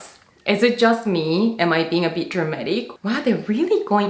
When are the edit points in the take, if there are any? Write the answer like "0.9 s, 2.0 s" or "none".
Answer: 2.9 s